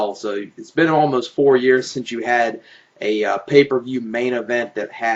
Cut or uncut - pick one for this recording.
uncut